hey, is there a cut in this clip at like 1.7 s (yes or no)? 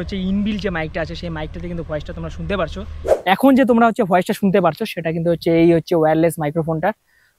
no